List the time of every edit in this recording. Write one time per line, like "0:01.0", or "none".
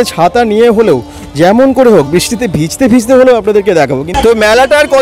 0:04.0